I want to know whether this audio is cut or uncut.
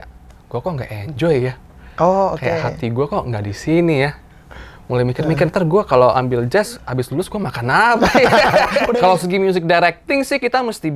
cut